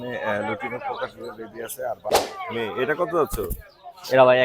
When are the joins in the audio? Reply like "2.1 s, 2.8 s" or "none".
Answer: 2.2 s